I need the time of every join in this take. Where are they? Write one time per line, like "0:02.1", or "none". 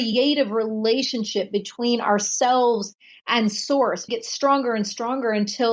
0:04.0